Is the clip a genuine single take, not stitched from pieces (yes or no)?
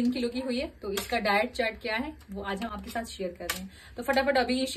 yes